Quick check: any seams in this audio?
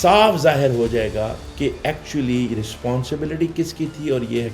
no; 0 cuts

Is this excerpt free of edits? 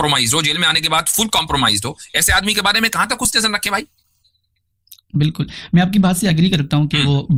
yes; 0 cuts

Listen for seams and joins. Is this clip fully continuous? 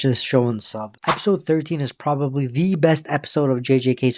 no; 1 cut; at 0.9 s

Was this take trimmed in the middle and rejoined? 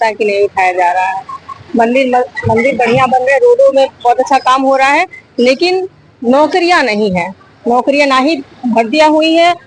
no; 0 cuts

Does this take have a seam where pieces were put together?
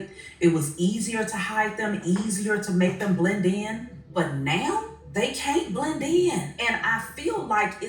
yes; 3 cuts; at 3.9 s, 5.0 s, 6.5 s

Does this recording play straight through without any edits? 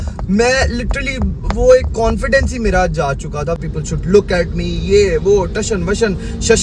no; 1 cut; at 3.6 s

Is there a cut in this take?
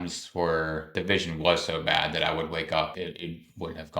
yes; 2 cuts; at 1.0 s, 2.9 s

